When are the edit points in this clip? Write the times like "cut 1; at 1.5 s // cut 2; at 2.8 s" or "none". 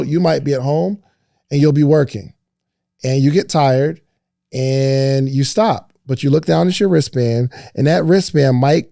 none